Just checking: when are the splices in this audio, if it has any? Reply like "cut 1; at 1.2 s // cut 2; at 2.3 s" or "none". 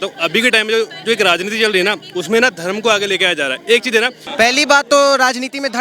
cut 1; at 4.2 s